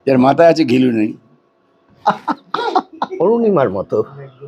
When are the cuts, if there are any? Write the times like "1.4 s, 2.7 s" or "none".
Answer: 3.0 s